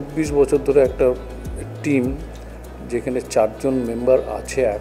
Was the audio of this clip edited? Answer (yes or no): no